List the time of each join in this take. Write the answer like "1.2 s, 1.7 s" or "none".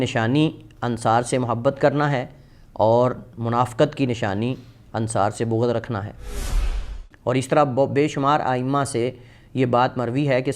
6.5 s